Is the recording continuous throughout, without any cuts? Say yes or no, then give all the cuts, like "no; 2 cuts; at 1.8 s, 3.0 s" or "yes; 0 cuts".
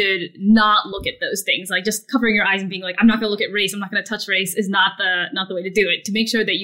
yes; 0 cuts